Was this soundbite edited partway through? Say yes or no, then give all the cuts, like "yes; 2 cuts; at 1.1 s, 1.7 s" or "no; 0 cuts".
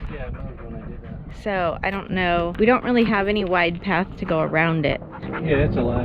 yes; 1 cut; at 2.5 s